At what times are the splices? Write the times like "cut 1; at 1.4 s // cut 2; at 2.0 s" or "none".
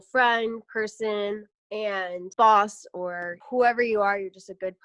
cut 1; at 2.2 s // cut 2; at 3.3 s